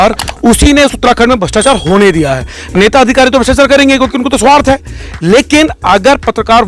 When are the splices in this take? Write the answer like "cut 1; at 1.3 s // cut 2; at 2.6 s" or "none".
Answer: none